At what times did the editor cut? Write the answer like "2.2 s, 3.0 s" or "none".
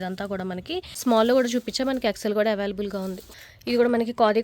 0.9 s